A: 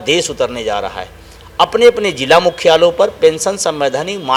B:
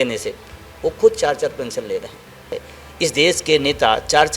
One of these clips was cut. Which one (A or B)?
B